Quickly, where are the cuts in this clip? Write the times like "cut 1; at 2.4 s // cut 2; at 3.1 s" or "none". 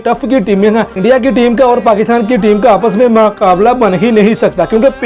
cut 1; at 0.9 s